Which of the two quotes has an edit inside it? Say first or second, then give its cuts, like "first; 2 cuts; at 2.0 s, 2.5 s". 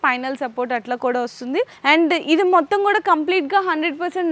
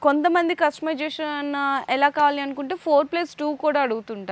first; 1 cut; at 1.7 s